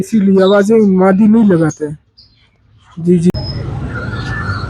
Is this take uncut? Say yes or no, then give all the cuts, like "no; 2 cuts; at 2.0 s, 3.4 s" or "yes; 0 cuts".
no; 1 cut; at 3.4 s